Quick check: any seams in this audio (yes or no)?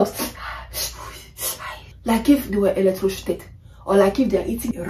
yes